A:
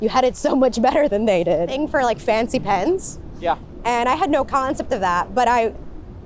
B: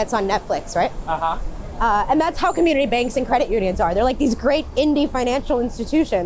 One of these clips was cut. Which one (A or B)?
A